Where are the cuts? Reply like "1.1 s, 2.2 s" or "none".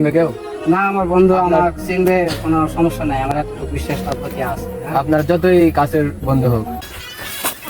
6.8 s